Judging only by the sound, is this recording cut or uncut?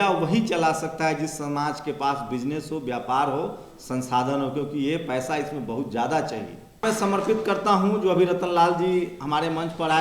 cut